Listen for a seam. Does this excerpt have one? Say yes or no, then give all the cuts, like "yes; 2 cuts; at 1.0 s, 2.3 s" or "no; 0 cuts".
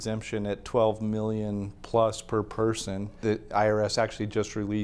yes; 1 cut; at 3.2 s